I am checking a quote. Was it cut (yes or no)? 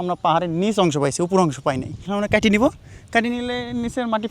yes